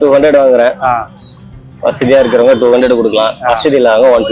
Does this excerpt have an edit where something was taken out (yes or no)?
no